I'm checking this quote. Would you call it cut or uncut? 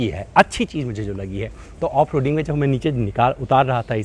uncut